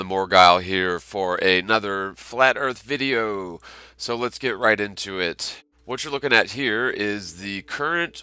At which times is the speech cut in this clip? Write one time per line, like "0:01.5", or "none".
0:05.5